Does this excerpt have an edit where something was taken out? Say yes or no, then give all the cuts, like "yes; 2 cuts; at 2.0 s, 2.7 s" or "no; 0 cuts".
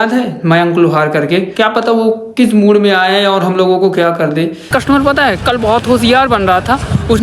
yes; 2 cuts; at 1.5 s, 4.7 s